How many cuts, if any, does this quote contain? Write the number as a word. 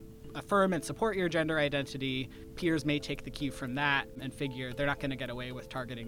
two